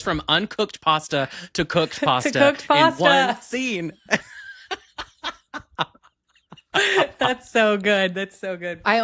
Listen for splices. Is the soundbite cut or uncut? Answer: uncut